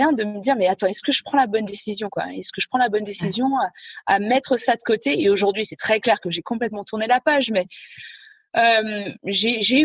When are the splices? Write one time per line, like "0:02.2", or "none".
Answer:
none